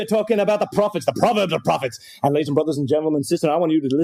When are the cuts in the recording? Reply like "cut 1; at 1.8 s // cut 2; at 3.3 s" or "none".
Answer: cut 1; at 1.0 s